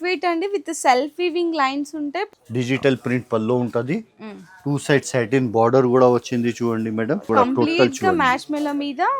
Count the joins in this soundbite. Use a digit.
2